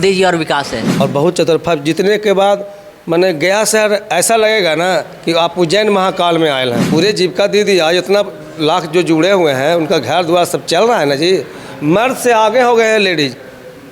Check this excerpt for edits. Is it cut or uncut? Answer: cut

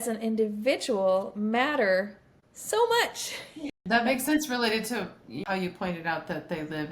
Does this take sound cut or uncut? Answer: cut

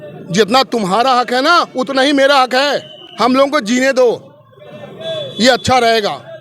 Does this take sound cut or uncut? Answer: uncut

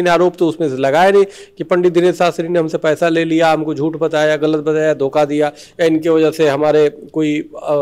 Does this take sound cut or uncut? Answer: uncut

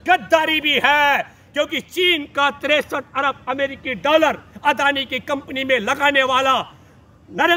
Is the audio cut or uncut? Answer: uncut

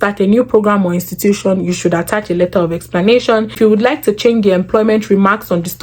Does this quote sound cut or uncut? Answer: uncut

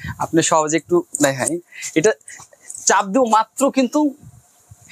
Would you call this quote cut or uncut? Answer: uncut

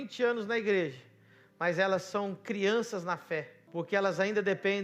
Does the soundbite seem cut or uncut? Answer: cut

